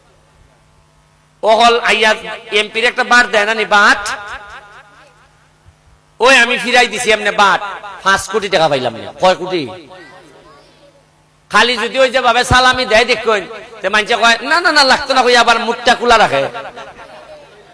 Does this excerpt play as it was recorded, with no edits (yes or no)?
yes